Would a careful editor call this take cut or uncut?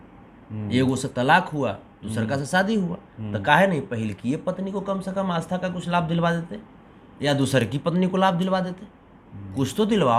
uncut